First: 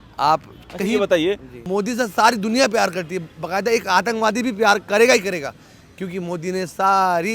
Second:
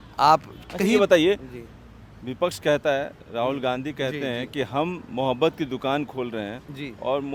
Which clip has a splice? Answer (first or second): first